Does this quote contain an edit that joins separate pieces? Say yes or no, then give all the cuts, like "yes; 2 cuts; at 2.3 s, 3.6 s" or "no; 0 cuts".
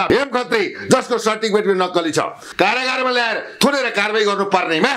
yes; 1 cut; at 2.4 s